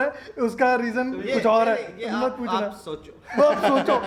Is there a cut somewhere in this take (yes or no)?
no